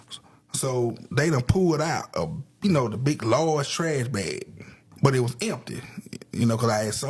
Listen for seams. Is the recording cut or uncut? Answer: uncut